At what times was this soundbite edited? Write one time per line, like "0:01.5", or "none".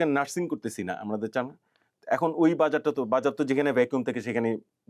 none

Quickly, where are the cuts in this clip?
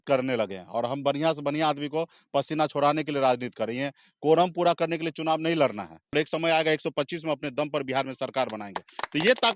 0:06.1

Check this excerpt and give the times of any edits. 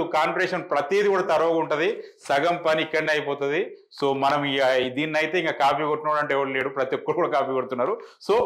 none

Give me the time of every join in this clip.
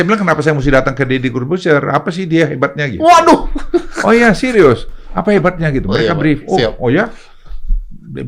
none

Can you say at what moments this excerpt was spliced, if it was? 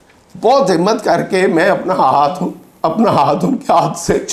none

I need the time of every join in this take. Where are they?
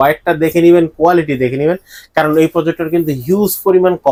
none

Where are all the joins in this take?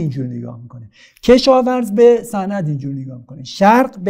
none

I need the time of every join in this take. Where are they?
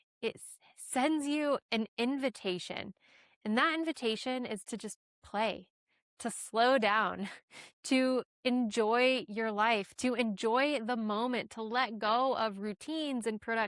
none

